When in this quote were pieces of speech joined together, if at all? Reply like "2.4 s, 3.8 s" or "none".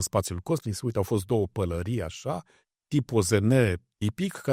none